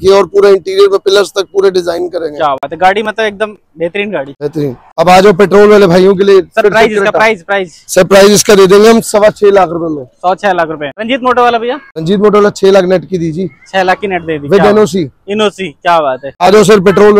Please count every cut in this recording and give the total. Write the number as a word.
zero